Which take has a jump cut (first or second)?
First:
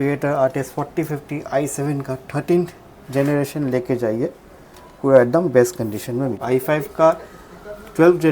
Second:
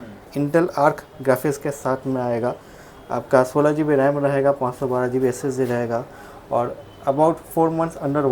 first